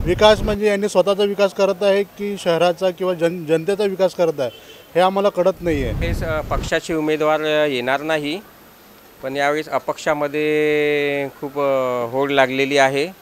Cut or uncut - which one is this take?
cut